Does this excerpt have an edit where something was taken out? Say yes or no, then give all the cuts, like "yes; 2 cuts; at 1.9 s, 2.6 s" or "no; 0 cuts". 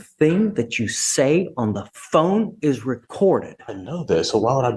no; 0 cuts